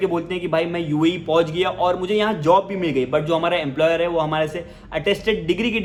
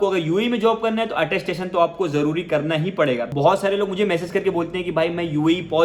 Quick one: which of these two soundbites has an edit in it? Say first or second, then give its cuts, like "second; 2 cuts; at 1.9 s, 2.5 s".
second; 1 cut; at 3.3 s